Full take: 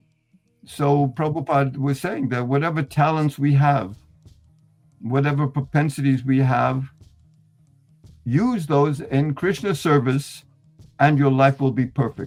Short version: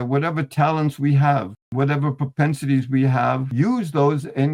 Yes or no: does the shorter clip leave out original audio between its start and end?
yes